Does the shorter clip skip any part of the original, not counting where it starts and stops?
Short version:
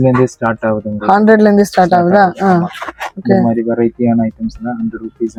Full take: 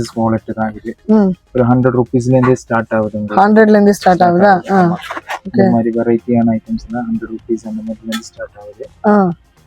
no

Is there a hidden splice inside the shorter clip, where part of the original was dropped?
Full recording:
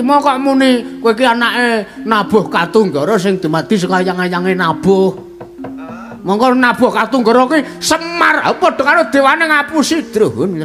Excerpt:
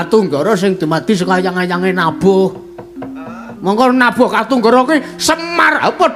no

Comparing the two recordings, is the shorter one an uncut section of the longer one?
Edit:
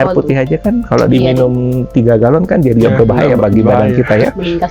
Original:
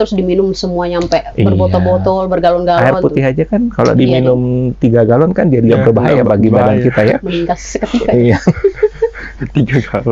yes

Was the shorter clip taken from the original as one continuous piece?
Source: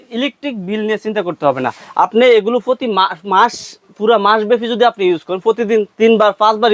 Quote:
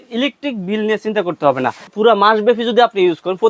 no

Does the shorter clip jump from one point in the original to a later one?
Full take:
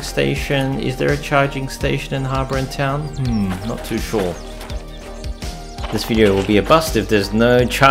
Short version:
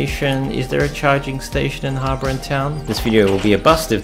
yes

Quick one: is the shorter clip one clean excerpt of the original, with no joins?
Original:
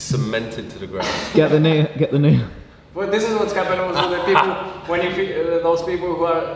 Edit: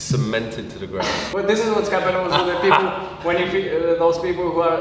no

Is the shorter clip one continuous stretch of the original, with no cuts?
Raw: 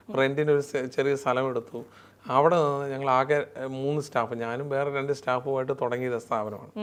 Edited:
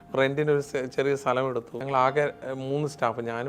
no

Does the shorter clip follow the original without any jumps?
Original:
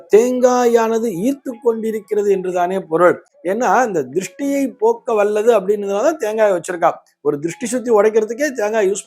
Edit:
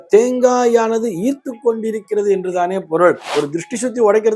no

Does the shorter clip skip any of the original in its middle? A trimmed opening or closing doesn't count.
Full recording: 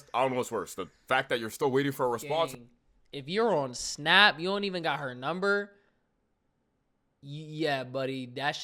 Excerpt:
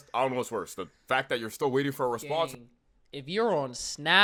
no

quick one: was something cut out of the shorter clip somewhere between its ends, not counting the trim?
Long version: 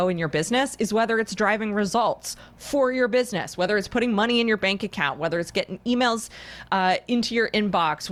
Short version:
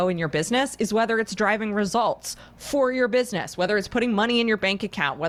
no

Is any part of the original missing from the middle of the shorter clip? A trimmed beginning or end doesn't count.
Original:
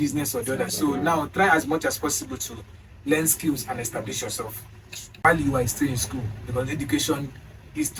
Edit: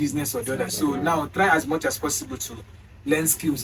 no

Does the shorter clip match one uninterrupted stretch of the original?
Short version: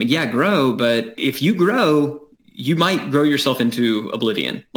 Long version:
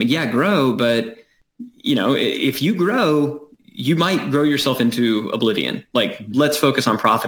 no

